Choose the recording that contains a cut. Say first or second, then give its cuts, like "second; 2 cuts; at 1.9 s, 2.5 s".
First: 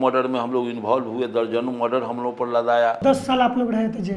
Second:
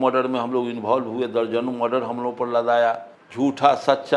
first; 1 cut; at 3.0 s